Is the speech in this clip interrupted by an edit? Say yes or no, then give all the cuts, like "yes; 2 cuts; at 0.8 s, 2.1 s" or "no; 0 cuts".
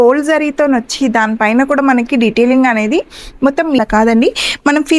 yes; 1 cut; at 3.8 s